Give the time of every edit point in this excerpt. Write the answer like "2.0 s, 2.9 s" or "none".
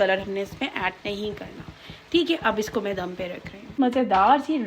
3.6 s